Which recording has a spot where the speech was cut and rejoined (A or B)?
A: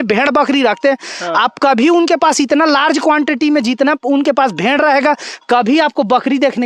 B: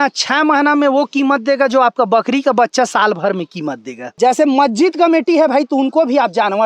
B